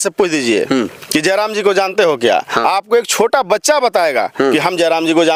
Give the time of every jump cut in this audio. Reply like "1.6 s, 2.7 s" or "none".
none